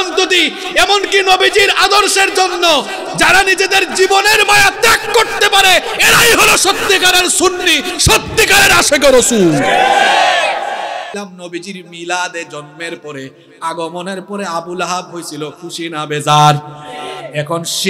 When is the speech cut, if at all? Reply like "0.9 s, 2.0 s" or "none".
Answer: 11.2 s

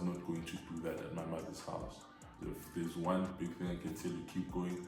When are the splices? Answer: 2.1 s

